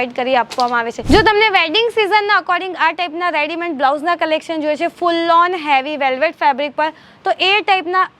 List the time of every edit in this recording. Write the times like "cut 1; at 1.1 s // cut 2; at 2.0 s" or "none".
cut 1; at 0.9 s